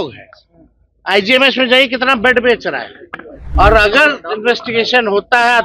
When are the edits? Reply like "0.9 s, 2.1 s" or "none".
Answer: 3.4 s